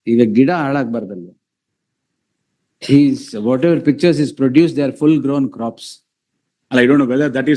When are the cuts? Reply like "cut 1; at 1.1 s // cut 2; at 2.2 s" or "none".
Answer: none

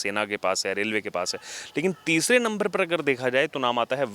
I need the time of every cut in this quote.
none

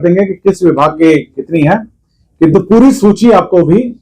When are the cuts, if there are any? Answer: none

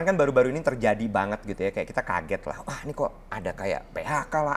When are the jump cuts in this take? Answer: none

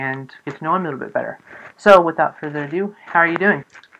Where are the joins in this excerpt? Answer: cut 1; at 2.4 s

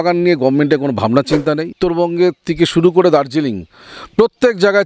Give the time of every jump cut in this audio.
cut 1; at 1.7 s

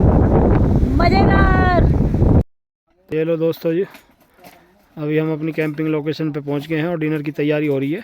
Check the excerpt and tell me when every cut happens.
cut 1; at 2.4 s

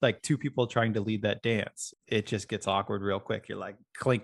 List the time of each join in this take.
cut 1; at 1.8 s

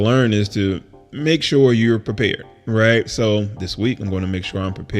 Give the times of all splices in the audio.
none

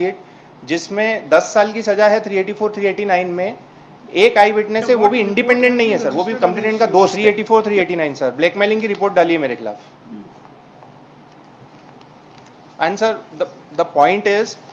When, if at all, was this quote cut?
cut 1; at 7.2 s

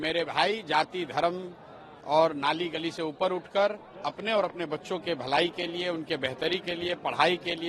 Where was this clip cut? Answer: none

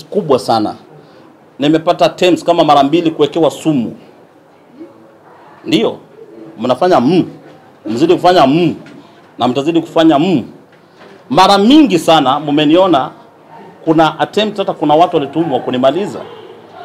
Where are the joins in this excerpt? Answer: none

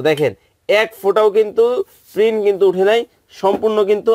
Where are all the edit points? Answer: none

